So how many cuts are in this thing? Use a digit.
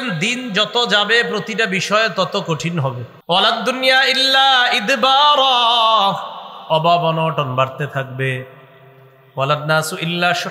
1